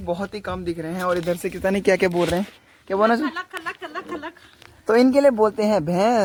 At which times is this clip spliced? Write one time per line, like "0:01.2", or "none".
none